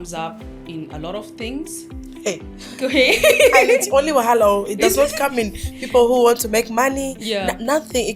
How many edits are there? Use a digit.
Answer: 0